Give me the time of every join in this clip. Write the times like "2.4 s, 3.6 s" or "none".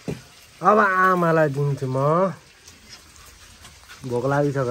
none